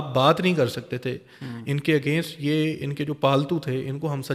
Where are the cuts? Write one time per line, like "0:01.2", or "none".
none